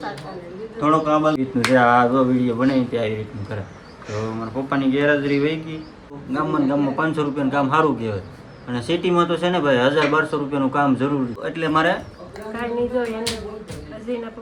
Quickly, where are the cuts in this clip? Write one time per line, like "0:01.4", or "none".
0:01.4
0:06.2
0:11.4